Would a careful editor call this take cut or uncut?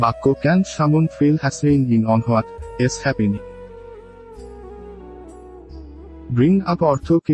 cut